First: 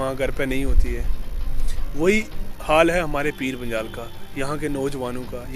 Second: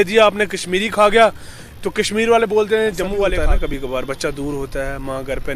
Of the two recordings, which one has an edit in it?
second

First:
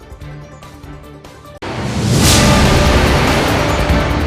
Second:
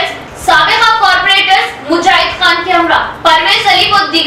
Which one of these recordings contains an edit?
first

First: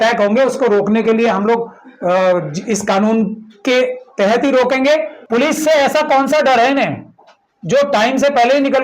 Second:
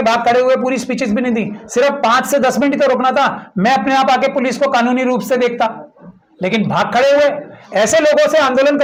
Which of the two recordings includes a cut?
first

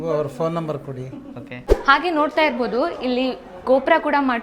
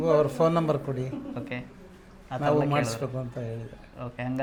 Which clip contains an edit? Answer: first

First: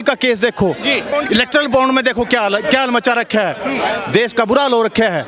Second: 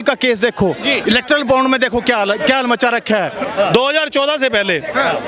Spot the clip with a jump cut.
second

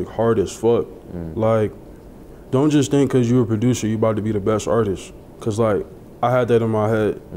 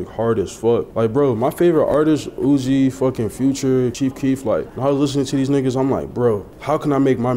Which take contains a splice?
second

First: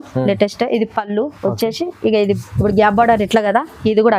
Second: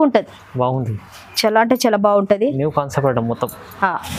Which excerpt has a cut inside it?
first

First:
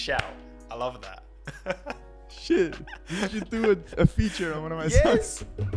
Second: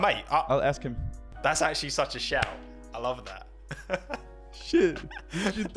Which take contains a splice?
second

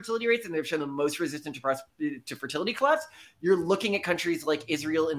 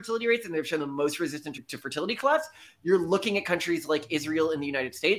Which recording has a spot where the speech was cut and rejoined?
second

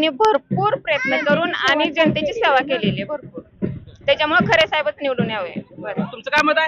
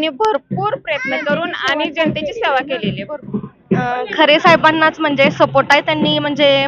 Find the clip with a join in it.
second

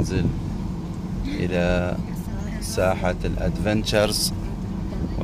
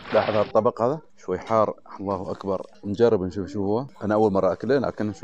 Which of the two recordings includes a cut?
second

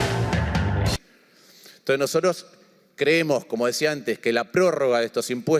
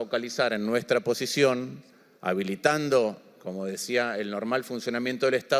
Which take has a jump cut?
first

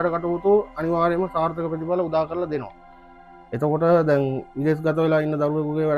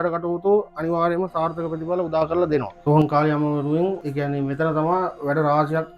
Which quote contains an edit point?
second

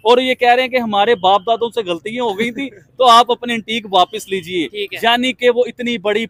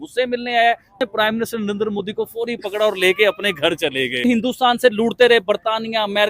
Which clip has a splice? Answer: second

